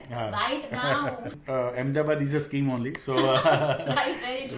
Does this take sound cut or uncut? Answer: cut